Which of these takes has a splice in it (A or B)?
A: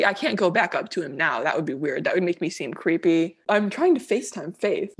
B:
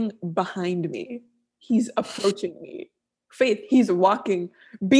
A